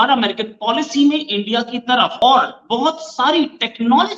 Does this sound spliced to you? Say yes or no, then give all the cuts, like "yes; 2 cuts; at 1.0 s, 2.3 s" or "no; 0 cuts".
yes; 1 cut; at 2.1 s